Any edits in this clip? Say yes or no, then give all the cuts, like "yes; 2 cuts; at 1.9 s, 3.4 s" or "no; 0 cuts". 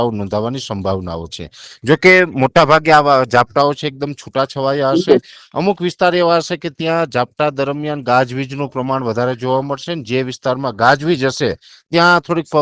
no; 0 cuts